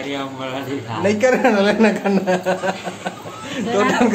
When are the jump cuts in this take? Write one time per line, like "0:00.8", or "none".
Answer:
none